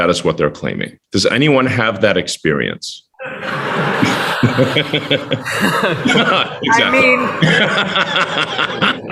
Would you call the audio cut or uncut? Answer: uncut